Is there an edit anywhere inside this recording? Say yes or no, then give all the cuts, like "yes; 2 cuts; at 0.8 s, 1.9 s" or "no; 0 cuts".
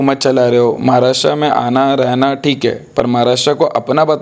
no; 0 cuts